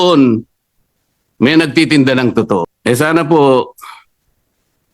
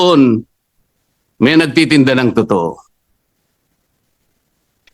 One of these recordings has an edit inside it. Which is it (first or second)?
first